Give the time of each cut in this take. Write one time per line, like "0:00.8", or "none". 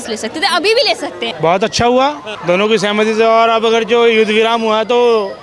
0:01.2